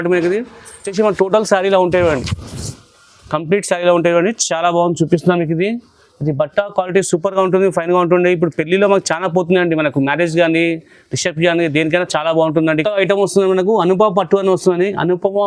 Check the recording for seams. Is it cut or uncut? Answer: cut